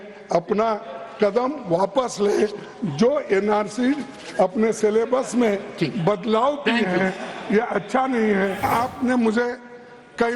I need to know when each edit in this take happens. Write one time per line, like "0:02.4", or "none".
0:08.6